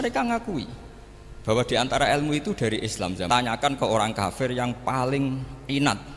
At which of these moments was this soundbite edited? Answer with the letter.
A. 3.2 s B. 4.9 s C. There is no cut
A